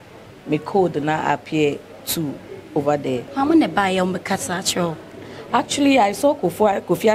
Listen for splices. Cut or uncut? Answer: cut